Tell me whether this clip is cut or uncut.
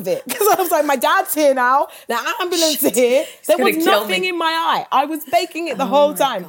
uncut